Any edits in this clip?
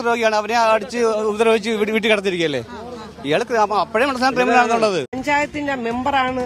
yes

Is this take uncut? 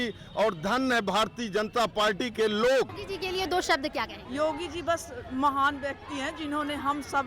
no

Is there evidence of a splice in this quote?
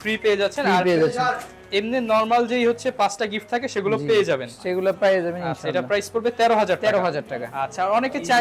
no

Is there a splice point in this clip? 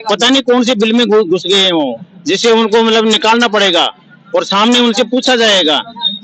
no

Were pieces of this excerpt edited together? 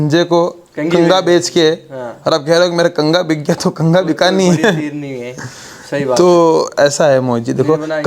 no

